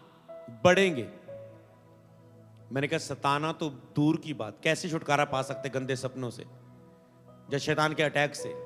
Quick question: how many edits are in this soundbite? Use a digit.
0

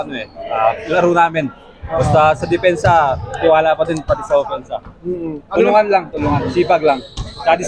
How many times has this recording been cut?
0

